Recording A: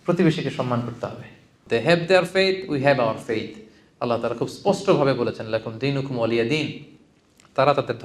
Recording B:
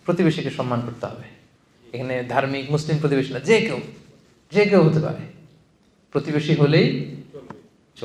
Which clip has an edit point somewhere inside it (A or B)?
A